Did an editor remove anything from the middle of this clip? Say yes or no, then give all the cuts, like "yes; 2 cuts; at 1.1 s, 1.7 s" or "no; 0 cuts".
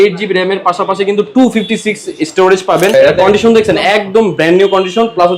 yes; 1 cut; at 2.9 s